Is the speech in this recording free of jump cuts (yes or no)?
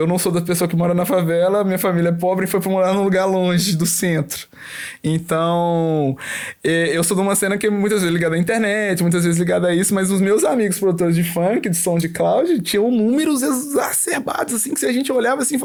yes